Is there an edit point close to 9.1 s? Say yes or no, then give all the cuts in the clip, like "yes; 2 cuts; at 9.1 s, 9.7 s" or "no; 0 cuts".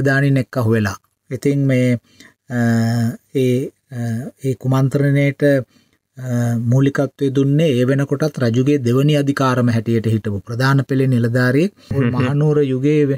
no; 1 cut; at 11.9 s